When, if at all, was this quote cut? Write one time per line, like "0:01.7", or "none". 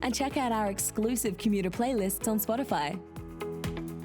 0:03.1